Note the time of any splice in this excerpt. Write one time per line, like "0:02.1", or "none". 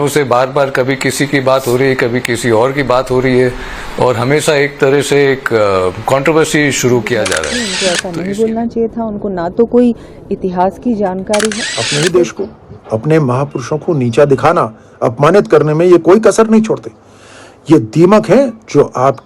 0:07.6
0:11.7